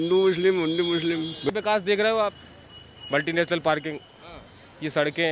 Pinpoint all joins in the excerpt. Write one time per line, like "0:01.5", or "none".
0:01.5